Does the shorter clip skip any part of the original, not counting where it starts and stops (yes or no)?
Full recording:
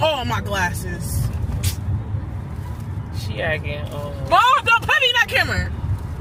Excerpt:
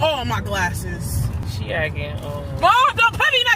yes